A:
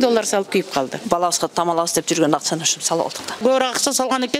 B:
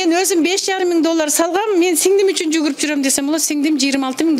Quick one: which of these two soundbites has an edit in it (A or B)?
A